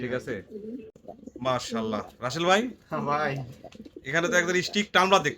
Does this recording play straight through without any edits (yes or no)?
no